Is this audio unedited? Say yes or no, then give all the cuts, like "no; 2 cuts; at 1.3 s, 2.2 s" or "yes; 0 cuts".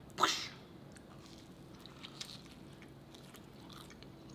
yes; 0 cuts